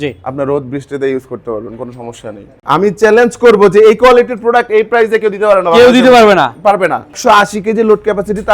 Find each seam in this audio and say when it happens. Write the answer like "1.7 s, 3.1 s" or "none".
2.5 s, 7.2 s